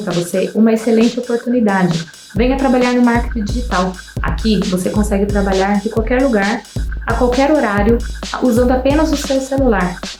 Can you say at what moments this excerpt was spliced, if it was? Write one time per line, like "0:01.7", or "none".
none

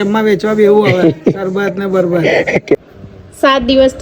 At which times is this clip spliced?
0:02.8

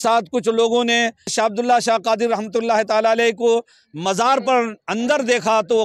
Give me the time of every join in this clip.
none

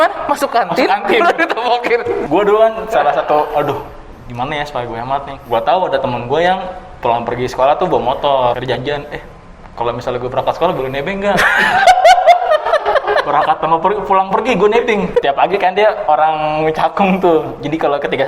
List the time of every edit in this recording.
0:02.2
0:05.3
0:08.6
0:15.2

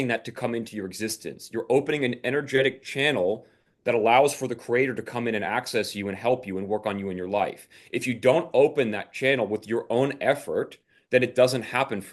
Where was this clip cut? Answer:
none

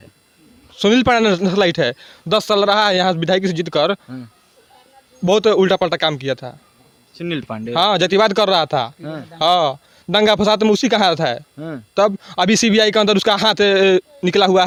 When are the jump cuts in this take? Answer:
none

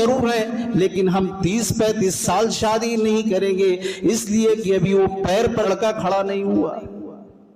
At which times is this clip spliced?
0:05.7

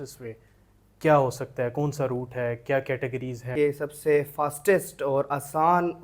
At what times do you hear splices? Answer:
0:03.5

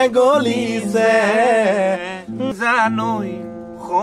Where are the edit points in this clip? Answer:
0:02.5

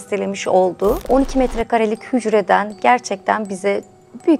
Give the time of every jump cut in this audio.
0:01.0

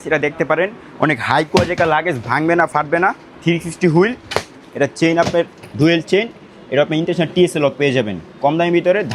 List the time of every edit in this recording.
none

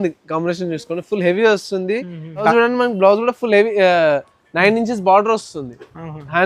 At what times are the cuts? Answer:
0:02.5

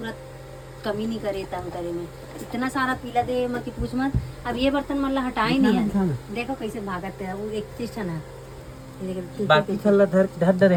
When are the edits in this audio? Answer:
none

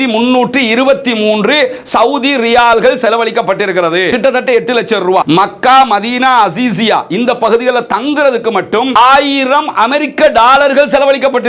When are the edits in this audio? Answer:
0:04.1

